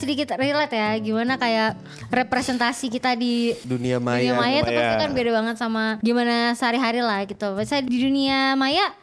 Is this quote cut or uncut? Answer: cut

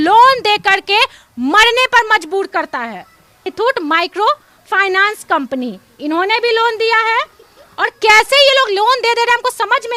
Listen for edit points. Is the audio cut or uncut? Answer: uncut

